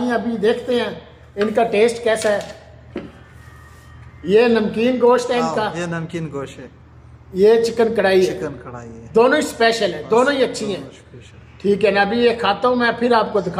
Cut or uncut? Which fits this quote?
uncut